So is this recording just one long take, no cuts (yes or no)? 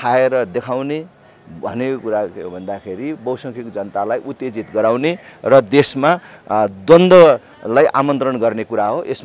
yes